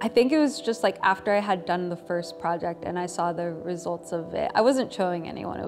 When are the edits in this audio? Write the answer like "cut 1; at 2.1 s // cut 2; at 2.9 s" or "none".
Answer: none